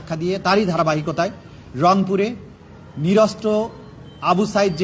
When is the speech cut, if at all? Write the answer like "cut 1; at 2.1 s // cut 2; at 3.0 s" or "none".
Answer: none